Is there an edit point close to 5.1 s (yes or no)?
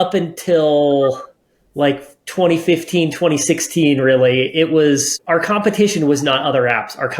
yes